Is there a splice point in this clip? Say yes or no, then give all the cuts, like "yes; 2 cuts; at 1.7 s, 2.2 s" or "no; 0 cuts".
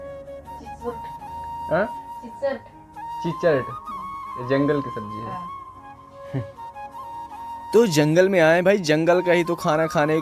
no; 0 cuts